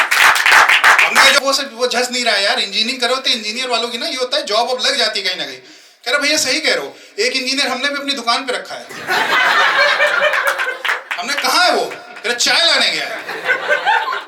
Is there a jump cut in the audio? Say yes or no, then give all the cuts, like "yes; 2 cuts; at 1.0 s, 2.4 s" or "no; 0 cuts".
yes; 1 cut; at 1.4 s